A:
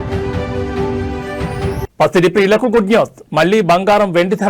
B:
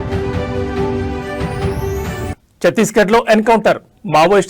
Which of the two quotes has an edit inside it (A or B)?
B